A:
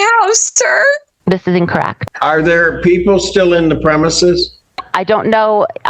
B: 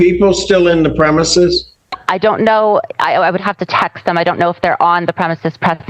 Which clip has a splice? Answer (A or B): A